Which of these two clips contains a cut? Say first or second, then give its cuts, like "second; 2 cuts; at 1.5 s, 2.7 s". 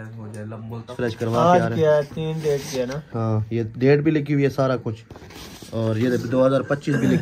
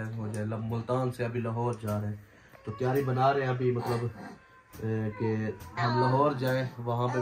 first; 1 cut; at 0.9 s